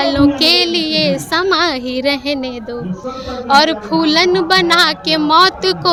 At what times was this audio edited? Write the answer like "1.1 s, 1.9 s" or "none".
none